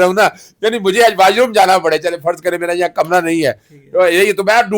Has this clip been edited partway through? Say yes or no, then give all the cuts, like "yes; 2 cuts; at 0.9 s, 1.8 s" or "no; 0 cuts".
no; 0 cuts